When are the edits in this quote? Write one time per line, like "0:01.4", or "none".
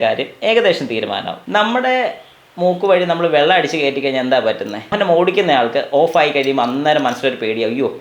0:01.3
0:04.9